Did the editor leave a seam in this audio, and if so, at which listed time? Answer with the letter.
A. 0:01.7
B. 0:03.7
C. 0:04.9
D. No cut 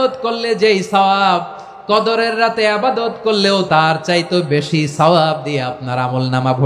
B